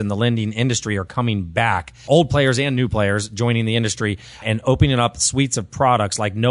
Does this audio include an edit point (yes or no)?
yes